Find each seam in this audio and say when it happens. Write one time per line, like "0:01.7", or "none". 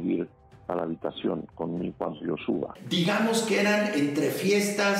0:02.8